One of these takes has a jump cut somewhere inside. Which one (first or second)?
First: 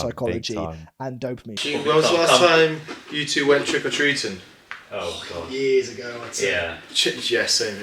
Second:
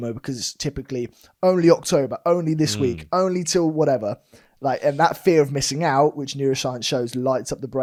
first